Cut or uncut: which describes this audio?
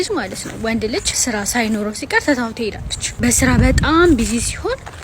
cut